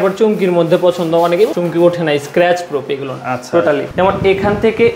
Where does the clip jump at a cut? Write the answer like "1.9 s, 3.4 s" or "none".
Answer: 1.5 s, 3.9 s